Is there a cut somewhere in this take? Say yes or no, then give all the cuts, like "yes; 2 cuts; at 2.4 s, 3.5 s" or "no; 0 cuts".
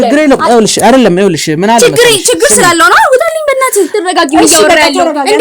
yes; 1 cut; at 3.9 s